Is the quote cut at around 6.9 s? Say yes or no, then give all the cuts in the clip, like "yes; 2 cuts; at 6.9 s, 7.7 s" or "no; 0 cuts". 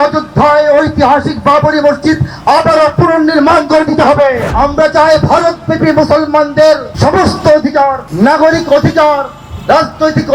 yes; 3 cuts; at 4.5 s, 6.9 s, 8.0 s